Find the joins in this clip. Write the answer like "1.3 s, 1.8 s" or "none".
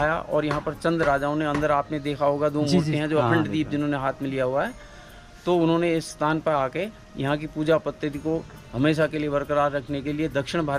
none